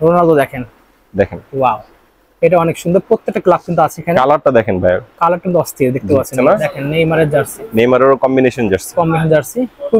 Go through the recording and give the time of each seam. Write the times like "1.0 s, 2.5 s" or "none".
6.3 s